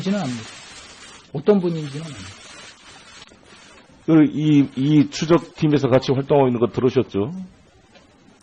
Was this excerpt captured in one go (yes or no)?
yes